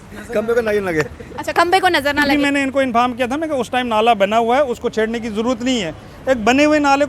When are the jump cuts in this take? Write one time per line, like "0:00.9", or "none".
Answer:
0:02.3